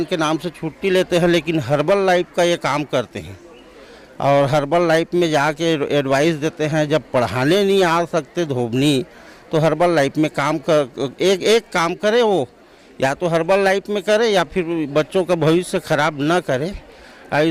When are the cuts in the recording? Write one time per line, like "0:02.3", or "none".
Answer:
none